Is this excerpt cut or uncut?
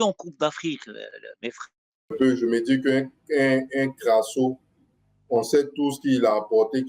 cut